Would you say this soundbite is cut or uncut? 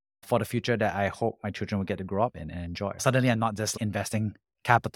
cut